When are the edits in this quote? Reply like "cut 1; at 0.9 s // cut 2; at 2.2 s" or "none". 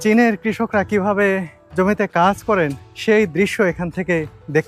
cut 1; at 1.6 s // cut 2; at 2.9 s